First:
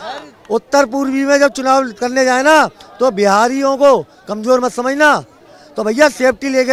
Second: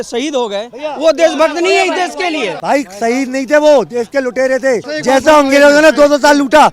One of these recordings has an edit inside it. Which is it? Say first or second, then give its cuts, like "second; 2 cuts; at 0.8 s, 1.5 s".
second; 2 cuts; at 2.5 s, 4.9 s